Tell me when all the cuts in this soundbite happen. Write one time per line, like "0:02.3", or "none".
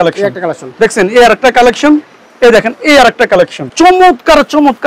0:03.6